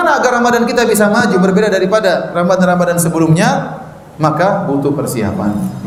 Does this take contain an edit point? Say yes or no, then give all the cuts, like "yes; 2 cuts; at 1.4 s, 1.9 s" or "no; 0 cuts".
no; 0 cuts